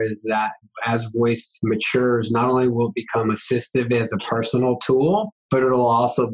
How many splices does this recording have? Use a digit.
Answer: 1